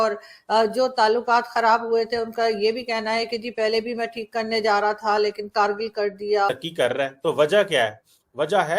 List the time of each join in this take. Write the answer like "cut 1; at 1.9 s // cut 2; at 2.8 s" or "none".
cut 1; at 6.5 s